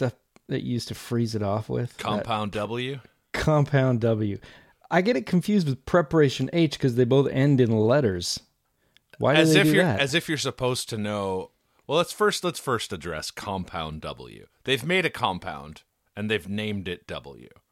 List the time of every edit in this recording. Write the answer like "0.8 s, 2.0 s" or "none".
none

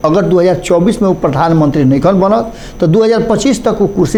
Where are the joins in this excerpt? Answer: none

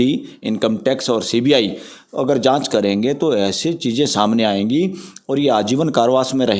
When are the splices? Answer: none

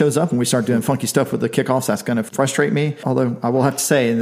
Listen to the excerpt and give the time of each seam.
2.3 s, 3.0 s

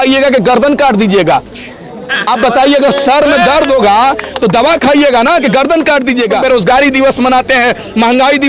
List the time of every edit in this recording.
6.4 s

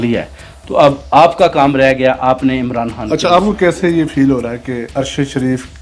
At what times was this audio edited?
4.9 s

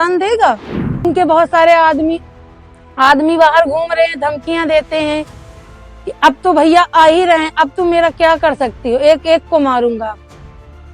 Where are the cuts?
1.0 s

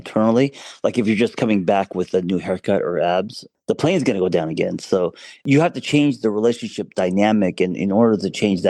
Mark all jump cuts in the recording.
3.4 s, 5.4 s

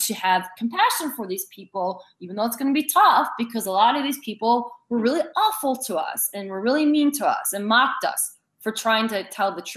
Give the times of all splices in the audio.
none

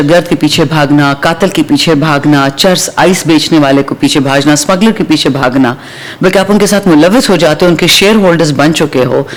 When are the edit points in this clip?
none

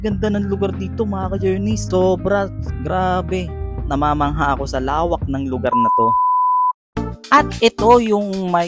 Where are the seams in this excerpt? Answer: none

